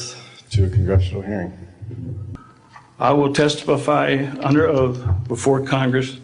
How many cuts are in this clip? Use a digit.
1